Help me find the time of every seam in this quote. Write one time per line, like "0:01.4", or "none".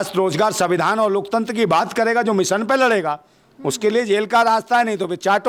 none